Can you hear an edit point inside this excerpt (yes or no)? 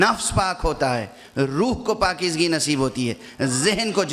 no